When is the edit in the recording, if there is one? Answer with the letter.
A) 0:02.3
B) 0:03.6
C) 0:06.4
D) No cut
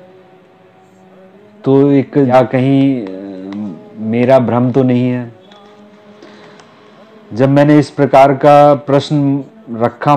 A